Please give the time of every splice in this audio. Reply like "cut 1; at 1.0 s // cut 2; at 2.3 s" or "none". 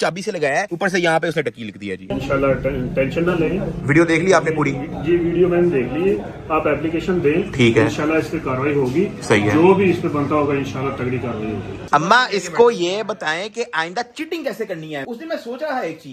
cut 1; at 2.1 s // cut 2; at 11.8 s